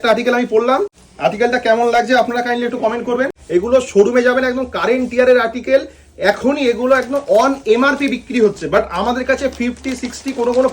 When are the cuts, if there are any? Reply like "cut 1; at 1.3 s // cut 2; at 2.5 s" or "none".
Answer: cut 1; at 1.0 s // cut 2; at 3.4 s